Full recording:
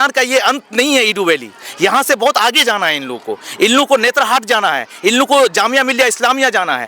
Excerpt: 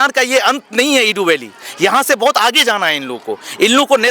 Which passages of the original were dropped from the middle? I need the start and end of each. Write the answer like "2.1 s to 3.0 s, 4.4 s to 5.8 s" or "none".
none